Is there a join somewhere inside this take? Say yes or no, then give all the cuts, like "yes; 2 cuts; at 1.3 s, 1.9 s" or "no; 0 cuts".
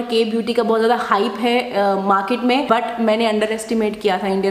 yes; 1 cut; at 2.7 s